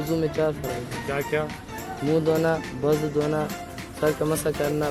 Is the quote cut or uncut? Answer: uncut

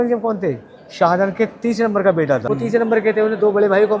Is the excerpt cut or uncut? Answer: cut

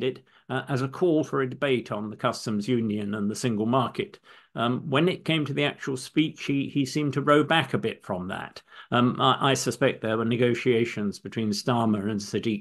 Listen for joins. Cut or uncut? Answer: uncut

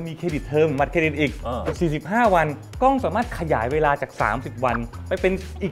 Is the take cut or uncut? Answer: uncut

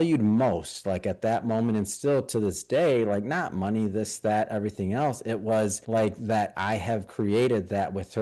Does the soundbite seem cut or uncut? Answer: cut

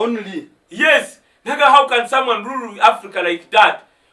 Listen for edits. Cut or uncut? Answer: uncut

